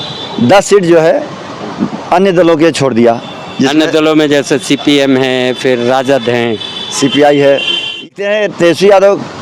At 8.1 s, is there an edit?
yes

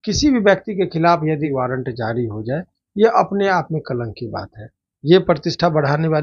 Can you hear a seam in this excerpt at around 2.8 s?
no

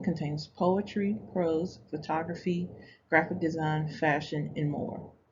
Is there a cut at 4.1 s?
no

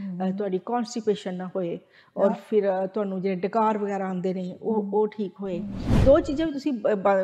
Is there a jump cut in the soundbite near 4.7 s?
no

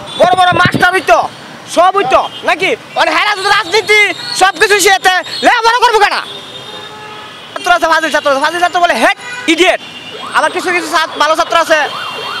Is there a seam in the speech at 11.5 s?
no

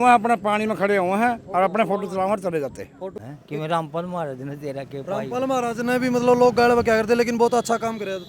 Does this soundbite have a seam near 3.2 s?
yes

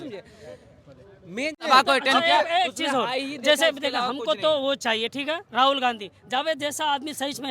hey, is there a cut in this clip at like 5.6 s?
no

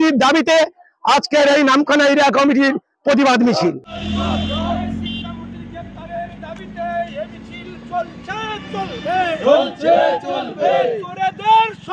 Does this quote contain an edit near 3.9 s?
yes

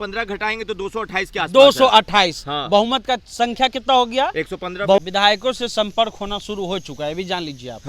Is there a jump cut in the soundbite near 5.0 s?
yes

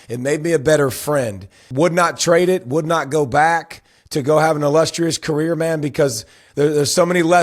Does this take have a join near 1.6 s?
yes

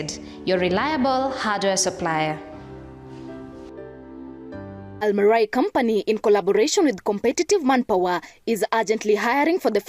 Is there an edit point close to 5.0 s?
yes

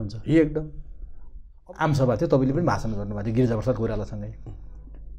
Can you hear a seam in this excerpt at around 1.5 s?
yes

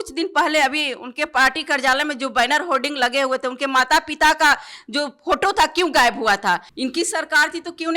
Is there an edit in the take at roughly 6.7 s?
yes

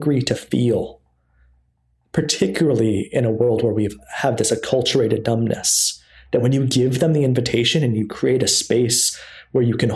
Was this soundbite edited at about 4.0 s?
no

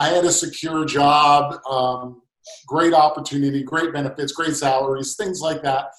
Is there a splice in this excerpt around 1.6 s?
no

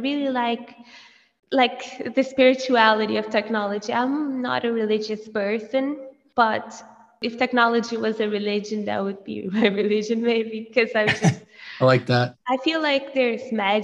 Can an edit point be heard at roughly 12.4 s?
yes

